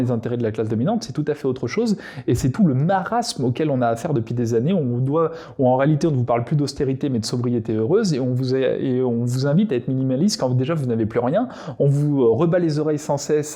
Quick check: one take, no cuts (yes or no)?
yes